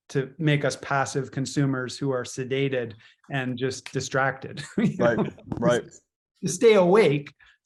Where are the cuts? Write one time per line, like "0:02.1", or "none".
none